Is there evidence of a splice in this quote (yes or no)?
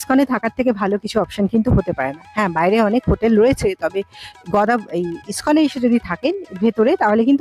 no